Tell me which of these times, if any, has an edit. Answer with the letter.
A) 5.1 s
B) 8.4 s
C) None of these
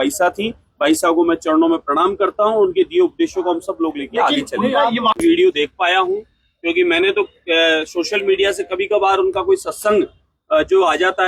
A